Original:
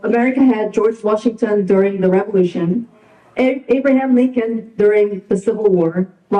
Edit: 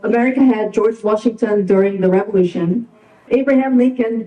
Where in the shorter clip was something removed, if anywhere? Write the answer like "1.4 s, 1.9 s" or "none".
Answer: 3.2 s

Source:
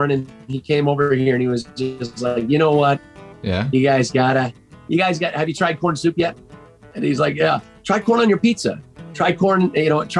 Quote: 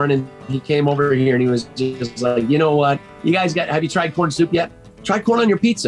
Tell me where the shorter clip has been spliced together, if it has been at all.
3.1 s, 4.9 s

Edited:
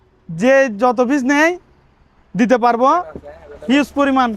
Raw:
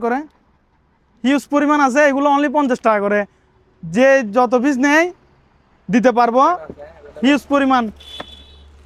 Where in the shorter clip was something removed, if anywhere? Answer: none

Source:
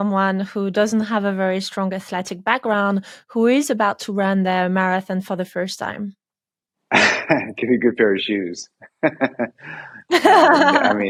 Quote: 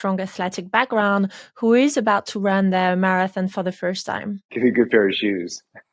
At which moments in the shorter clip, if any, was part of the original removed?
4.5 s

